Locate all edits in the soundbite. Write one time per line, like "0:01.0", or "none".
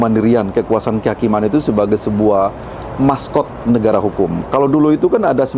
0:04.4